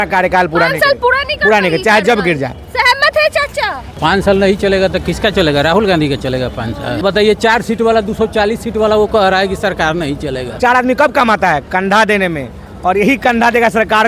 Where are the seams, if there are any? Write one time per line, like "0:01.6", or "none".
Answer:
0:03.9
0:07.0
0:10.5